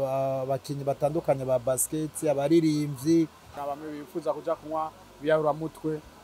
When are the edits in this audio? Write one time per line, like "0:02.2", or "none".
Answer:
0:03.6